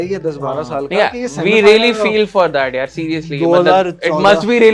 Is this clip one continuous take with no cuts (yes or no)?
yes